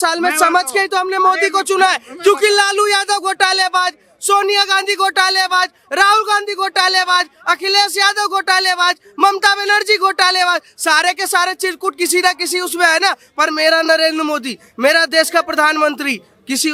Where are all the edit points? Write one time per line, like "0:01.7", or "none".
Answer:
none